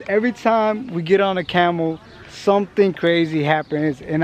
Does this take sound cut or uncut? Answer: uncut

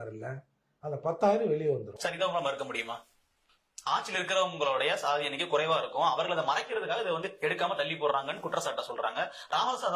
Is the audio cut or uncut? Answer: uncut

